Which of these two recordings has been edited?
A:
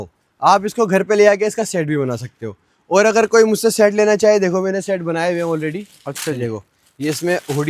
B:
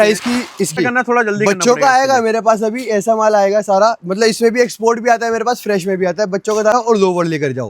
B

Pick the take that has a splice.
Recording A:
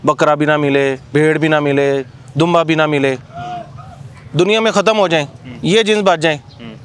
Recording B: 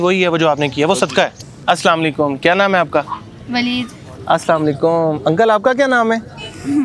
B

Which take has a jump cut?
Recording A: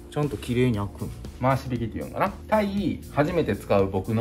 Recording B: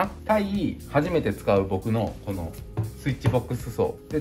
A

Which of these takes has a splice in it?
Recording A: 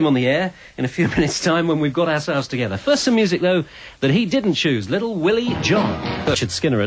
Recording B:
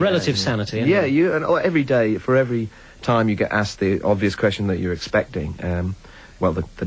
B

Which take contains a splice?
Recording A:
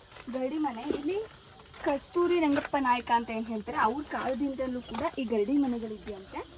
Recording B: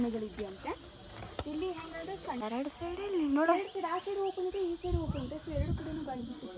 B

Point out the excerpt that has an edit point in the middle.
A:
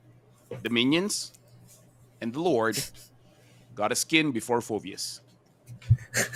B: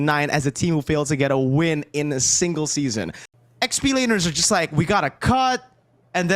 B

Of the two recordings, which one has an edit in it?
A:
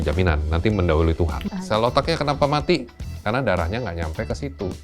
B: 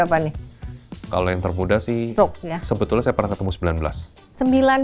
A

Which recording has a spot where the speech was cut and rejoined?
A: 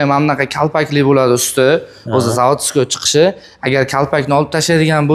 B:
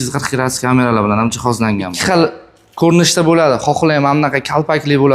B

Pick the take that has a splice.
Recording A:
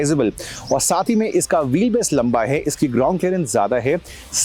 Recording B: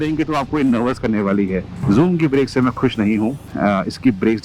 B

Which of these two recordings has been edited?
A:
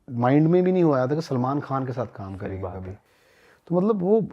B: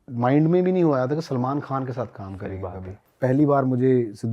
B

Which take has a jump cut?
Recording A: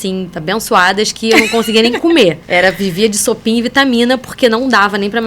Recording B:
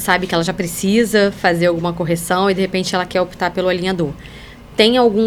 A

